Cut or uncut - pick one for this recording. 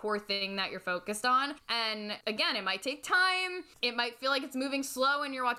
cut